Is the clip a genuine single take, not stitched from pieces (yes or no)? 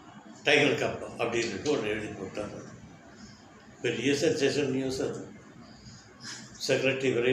yes